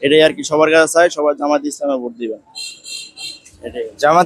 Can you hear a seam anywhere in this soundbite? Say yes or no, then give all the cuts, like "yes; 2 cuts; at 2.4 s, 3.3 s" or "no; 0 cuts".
no; 0 cuts